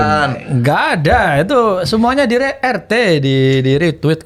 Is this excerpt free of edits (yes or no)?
yes